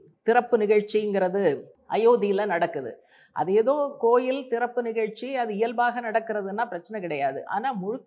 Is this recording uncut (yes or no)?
no